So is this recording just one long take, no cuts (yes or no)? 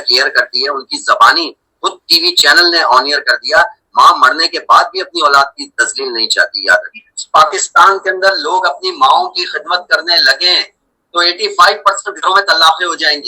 no